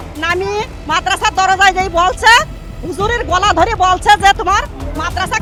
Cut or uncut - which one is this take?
uncut